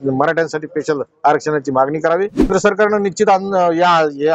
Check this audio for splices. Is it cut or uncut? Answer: cut